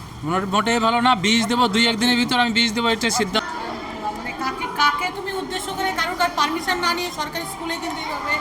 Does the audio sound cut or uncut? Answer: cut